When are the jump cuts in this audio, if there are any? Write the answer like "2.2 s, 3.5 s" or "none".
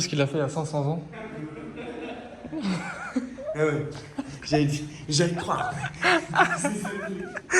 none